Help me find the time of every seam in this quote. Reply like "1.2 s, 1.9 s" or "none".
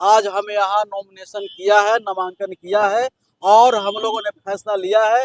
none

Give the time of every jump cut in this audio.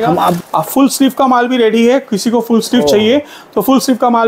none

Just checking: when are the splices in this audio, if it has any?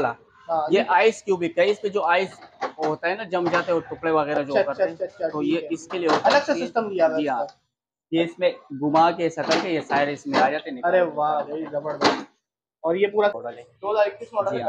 13.5 s

